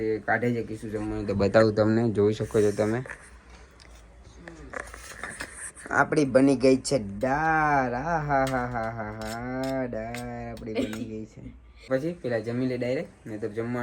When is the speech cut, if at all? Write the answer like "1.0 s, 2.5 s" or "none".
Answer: 11.9 s